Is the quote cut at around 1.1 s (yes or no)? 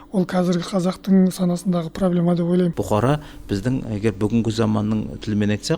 no